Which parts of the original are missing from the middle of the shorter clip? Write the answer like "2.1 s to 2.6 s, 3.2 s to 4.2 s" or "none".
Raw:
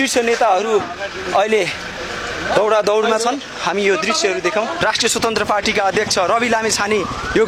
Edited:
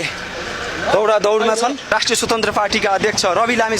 3.5 s to 4.8 s